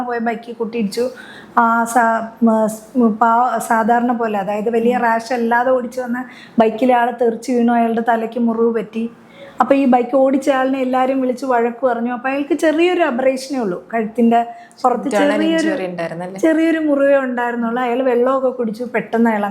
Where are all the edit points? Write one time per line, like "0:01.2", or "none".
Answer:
none